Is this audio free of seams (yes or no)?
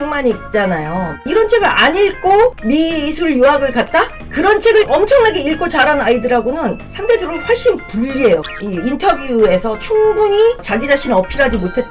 no